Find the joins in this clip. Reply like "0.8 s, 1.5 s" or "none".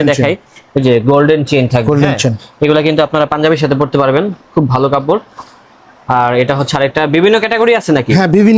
none